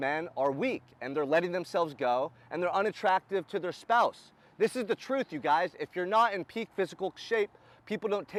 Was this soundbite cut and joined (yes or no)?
no